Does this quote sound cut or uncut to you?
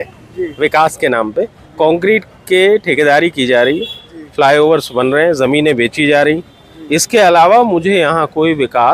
uncut